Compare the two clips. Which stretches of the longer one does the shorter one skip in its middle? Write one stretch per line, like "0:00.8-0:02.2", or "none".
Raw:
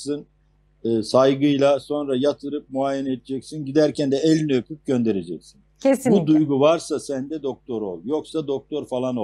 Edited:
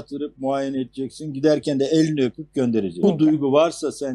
0:05.3-0:06.1